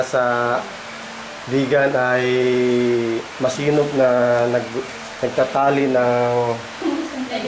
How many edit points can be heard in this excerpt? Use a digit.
0